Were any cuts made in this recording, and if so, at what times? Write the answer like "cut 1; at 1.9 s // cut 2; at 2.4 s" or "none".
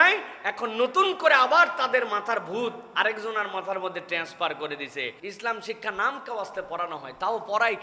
cut 1; at 5.2 s